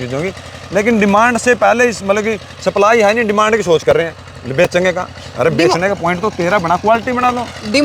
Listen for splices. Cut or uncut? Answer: uncut